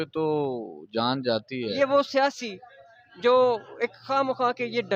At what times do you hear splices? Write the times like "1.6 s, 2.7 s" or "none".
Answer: 1.8 s

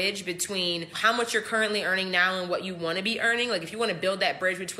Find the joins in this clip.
0.9 s

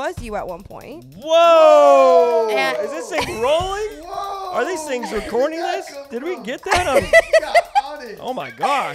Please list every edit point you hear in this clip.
none

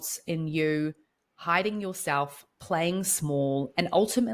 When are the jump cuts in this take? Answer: none

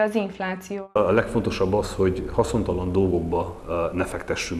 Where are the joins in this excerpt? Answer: 1.0 s

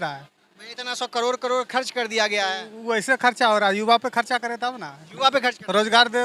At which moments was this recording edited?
none

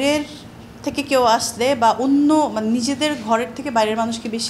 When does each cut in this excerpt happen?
none

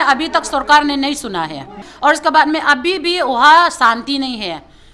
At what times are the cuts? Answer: 1.9 s

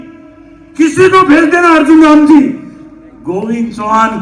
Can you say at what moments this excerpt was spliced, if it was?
none

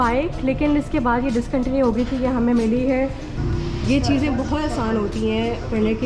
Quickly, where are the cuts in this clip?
3.3 s

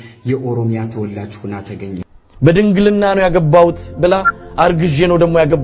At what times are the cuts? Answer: 2.2 s

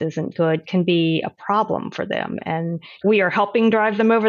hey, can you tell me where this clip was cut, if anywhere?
2.9 s

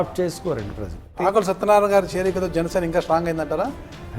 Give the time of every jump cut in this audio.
1.1 s

